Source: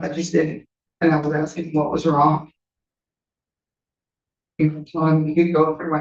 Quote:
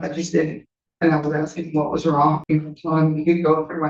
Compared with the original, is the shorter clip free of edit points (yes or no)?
no